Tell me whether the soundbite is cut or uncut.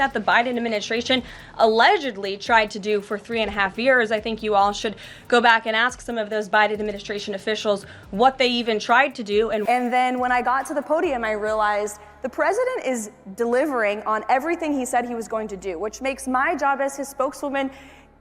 cut